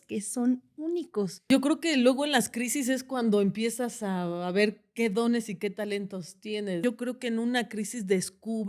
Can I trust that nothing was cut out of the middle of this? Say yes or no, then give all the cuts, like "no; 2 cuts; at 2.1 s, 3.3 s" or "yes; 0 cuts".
no; 2 cuts; at 1.5 s, 6.8 s